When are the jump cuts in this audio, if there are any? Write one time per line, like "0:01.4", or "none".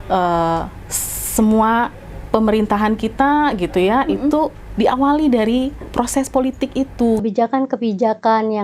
0:07.2

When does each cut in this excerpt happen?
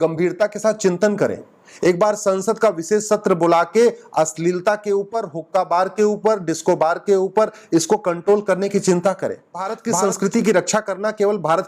0:09.7

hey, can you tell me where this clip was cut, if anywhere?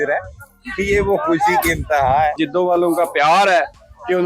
0:02.4

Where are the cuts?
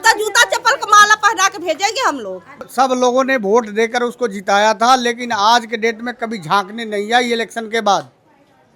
0:02.6

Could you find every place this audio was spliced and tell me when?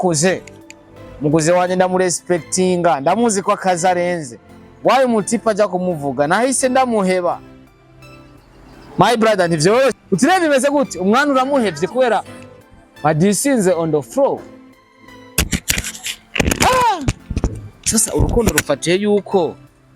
0:10.0

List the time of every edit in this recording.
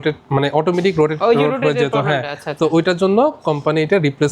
none

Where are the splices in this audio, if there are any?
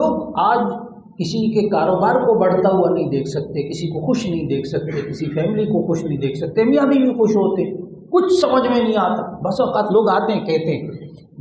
none

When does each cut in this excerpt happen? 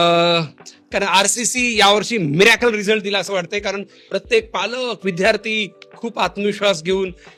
none

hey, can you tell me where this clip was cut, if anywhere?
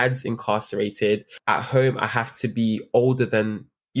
0:01.3

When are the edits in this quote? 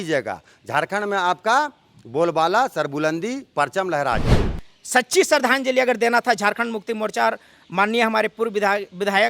0:04.3

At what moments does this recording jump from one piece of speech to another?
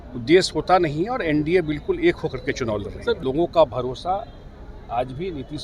0:03.2

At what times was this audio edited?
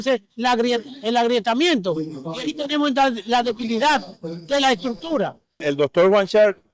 0:05.6

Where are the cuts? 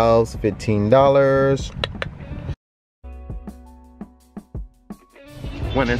0:02.6

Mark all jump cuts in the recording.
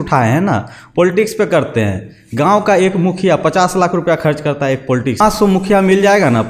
0:05.2

